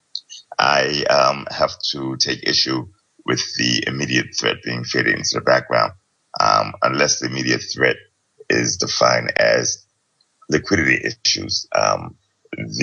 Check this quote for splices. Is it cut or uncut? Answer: cut